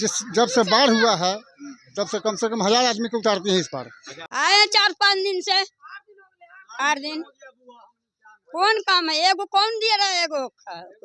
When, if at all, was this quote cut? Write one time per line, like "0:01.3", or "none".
0:04.2